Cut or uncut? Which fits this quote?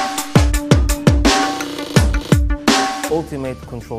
uncut